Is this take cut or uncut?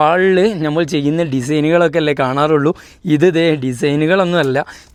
uncut